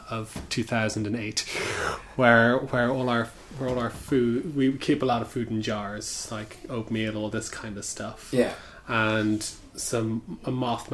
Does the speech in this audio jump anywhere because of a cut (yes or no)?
no